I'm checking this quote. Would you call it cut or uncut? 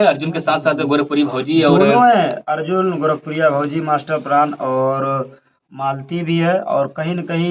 uncut